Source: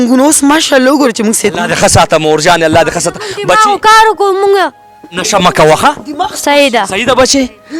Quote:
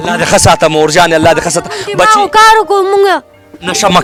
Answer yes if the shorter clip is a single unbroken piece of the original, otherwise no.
yes